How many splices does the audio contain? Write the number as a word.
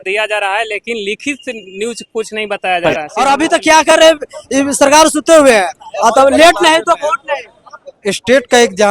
one